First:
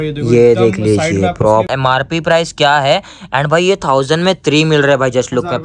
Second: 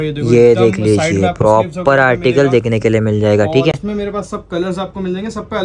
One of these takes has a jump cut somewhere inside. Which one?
first; 1 cut; at 1.7 s

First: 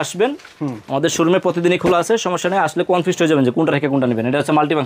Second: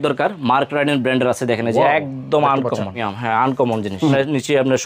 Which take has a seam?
second; 2 cuts; at 3.1 s, 4.1 s

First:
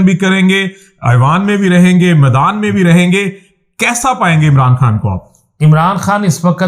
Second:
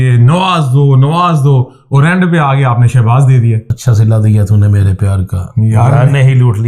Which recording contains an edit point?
second; 1 cut; at 3.7 s

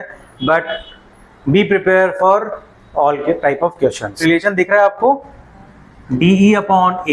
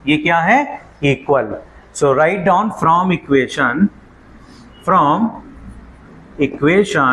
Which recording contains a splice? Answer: first; 1 cut; at 4.2 s

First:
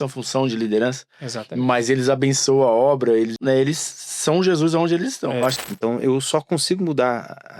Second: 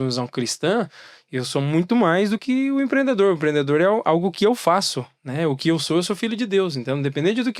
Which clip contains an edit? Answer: first; 2 cuts; at 3.3 s, 5.6 s

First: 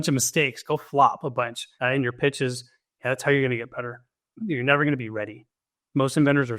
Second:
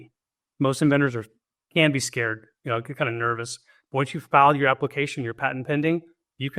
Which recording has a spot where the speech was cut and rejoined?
first; 1 cut; at 1.6 s

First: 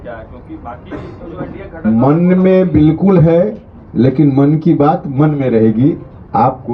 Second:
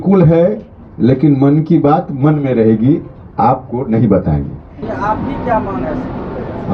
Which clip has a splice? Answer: second; 1 cut; at 4.8 s

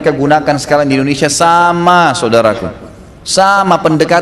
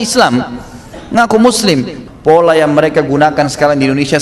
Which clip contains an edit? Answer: second; 1 cut; at 1.9 s

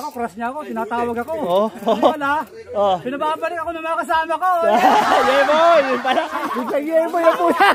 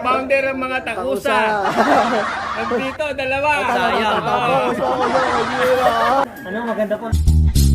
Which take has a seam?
second; 1 cut; at 6.3 s

